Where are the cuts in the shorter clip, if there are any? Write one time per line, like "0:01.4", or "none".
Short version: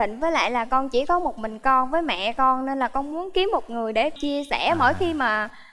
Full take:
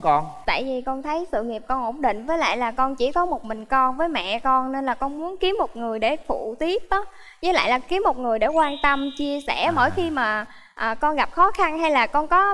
0:04.2